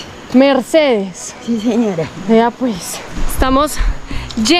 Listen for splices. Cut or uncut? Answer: uncut